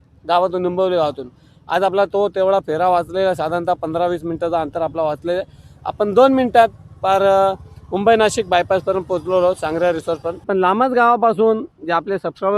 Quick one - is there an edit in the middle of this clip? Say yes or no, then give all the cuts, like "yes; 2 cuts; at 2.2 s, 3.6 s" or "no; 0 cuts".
yes; 1 cut; at 10.3 s